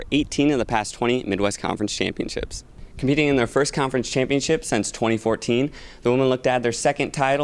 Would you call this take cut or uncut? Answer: cut